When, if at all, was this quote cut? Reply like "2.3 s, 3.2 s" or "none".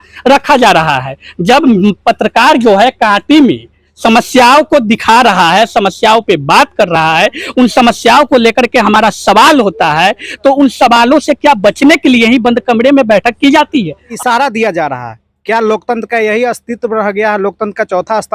14.0 s

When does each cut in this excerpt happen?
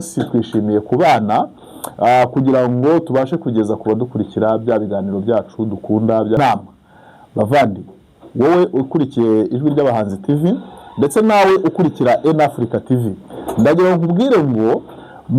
6.4 s

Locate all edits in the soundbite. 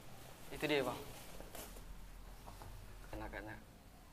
3.1 s

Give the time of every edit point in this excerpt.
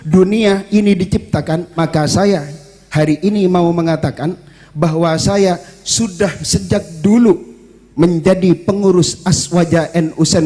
1.7 s

